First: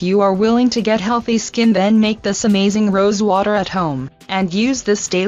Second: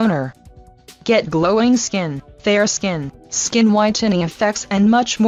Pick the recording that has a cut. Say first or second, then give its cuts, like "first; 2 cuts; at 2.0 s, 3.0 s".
first; 1 cut; at 1.4 s